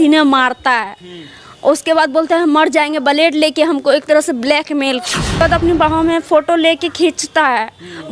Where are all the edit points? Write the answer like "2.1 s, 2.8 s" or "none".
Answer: 5.4 s